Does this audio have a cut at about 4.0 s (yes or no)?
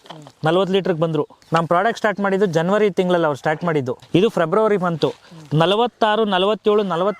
yes